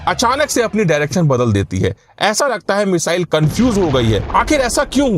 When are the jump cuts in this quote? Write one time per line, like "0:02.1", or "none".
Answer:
0:04.2